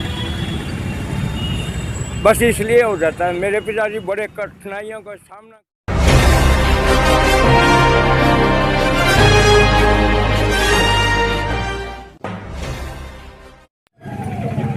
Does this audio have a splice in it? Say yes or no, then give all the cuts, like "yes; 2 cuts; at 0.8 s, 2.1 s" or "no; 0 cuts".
no; 0 cuts